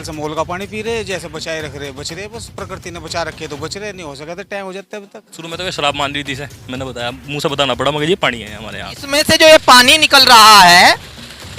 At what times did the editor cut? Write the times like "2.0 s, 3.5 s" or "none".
5.3 s, 9.1 s